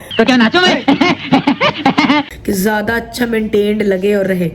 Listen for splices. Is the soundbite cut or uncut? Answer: cut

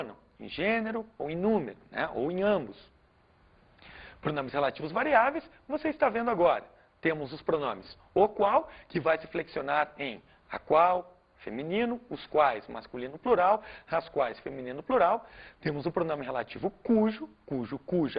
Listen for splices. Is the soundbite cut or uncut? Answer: uncut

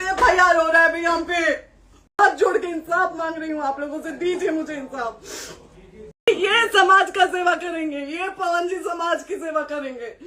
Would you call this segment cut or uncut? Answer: cut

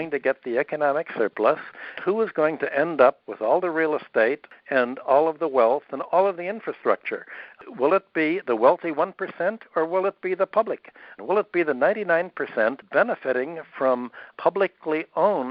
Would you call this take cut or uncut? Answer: cut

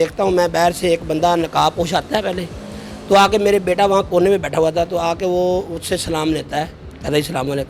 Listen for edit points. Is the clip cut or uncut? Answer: uncut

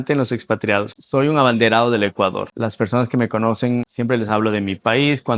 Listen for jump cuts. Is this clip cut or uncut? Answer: cut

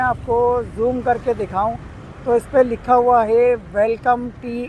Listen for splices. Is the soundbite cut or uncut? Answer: uncut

